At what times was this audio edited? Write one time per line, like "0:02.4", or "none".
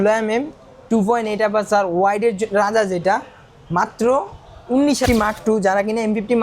0:05.0

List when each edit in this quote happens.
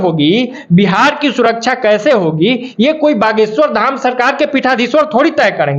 none

